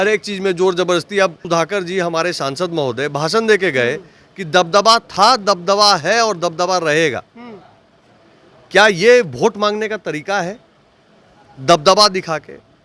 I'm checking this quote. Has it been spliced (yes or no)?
yes